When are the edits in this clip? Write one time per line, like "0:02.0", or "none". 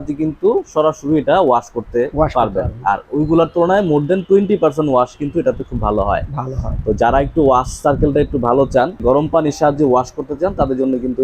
0:09.0